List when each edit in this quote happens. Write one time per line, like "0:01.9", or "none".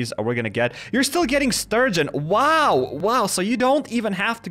0:02.9